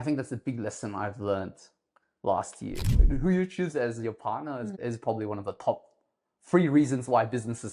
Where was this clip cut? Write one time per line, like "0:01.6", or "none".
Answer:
0:03.0